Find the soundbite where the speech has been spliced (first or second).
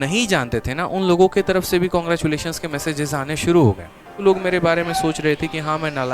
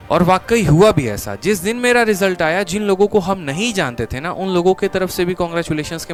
first